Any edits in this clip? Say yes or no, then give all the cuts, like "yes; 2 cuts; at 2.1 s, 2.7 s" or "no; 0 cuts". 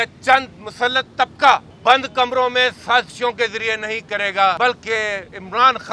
yes; 2 cuts; at 1.7 s, 4.6 s